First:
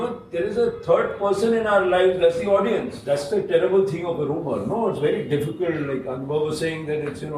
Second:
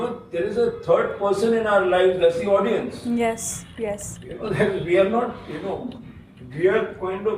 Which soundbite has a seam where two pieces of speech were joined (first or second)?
first